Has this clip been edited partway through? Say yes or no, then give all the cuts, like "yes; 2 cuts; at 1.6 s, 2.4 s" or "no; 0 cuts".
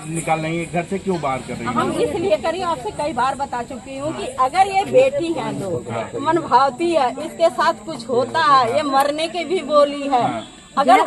no; 0 cuts